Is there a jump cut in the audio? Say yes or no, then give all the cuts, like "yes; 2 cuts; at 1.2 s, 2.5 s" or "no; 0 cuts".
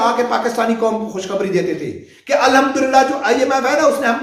no; 0 cuts